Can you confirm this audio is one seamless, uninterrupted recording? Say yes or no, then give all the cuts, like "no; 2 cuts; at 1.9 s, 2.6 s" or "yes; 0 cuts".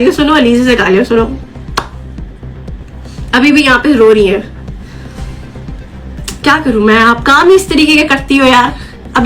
yes; 0 cuts